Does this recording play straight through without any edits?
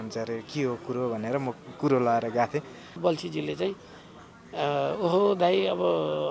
no; 1 cut; at 3.0 s

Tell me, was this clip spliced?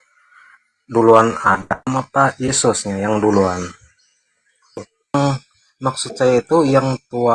yes; 1 cut; at 5.1 s

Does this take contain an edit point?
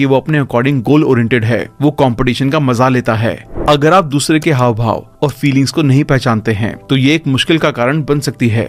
yes; 1 cut; at 3.5 s

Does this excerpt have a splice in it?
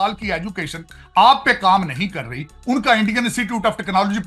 no; 0 cuts

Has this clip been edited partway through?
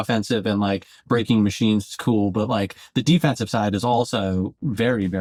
no; 0 cuts

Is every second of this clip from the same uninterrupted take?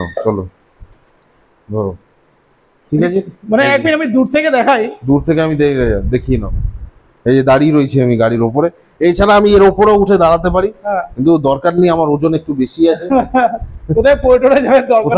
yes; 0 cuts

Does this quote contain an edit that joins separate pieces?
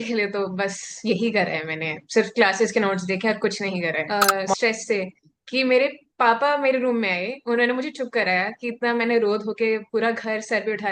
yes; 1 cut; at 4.0 s

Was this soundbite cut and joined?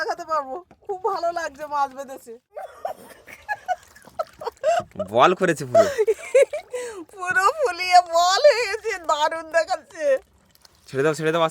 yes; 1 cut; at 2.7 s

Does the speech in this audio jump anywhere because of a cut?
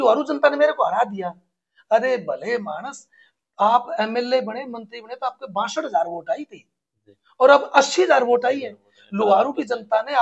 no; 0 cuts

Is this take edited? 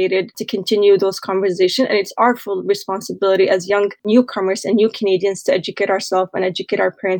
no; 0 cuts

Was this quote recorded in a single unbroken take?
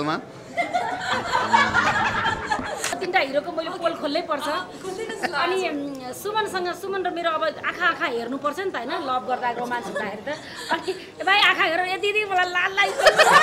no; 1 cut; at 3.0 s

